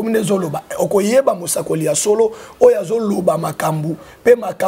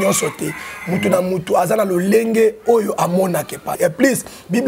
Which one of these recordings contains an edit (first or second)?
second